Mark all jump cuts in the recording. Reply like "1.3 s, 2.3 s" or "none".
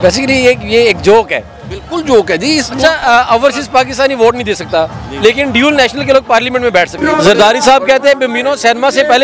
6.9 s